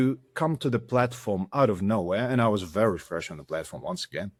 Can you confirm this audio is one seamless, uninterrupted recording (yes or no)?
yes